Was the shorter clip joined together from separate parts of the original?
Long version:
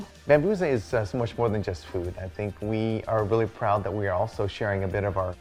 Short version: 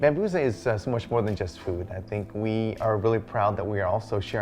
no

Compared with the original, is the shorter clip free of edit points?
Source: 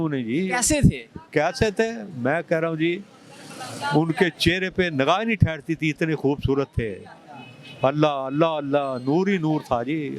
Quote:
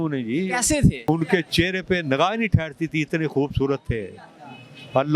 no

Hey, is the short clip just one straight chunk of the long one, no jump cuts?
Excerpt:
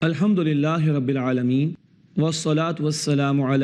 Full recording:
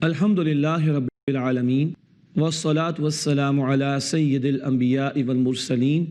no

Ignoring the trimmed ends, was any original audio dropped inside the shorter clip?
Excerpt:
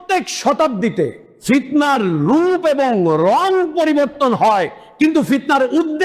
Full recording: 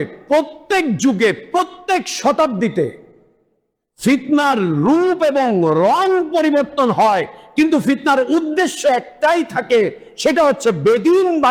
yes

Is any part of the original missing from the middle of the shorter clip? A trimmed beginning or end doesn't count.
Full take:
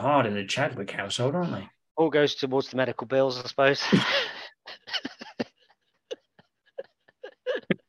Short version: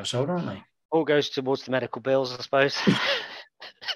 no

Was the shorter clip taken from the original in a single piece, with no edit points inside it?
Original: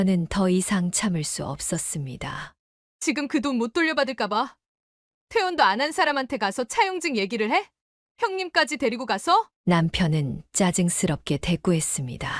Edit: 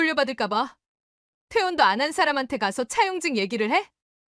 yes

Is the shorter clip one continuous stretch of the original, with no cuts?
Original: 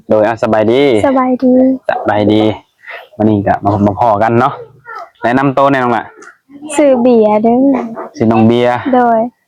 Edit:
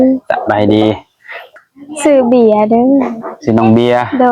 no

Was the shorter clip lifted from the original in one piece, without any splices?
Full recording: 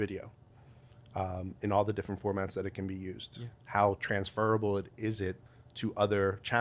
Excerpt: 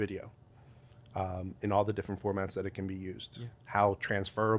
yes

